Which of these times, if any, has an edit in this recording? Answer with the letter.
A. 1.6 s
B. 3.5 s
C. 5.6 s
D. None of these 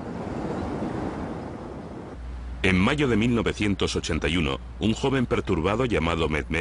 C